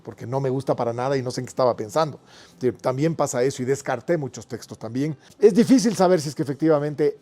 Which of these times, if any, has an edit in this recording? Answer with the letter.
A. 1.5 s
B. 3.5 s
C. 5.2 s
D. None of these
C